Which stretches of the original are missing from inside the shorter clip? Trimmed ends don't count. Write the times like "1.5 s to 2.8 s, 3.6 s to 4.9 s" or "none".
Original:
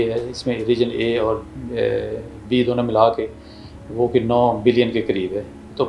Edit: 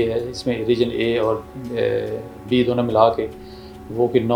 none